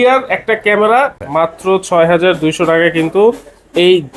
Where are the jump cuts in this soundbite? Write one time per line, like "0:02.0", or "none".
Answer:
0:01.2